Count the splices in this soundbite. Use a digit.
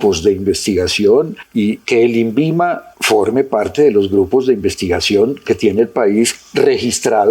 3